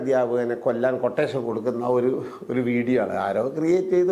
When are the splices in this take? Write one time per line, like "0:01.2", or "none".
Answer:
none